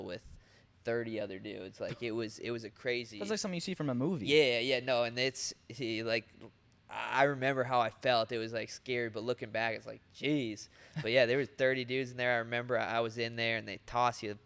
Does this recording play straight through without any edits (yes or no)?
yes